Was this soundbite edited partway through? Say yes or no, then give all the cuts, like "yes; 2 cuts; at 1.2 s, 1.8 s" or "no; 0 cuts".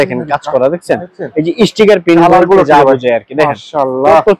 no; 0 cuts